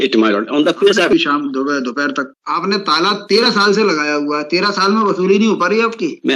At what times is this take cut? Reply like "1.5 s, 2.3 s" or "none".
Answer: 1.1 s, 2.3 s